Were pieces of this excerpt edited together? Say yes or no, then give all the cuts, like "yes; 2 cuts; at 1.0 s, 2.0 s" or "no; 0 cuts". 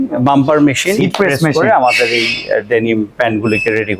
yes; 1 cut; at 0.9 s